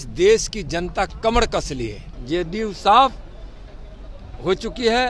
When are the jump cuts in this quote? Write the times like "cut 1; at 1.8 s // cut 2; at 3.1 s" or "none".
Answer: cut 1; at 2.1 s